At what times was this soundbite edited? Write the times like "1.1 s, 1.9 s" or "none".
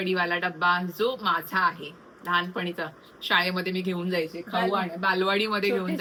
none